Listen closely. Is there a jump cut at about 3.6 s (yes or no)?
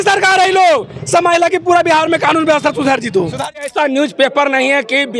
yes